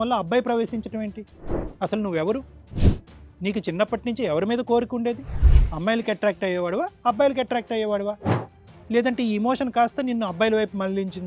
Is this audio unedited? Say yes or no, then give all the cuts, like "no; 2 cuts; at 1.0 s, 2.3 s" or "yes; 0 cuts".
yes; 0 cuts